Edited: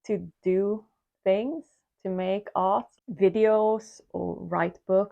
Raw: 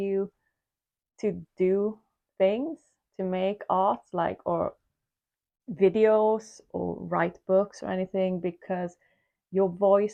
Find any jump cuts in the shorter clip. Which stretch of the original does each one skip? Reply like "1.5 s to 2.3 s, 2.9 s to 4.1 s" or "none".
4.1 s to 5.5 s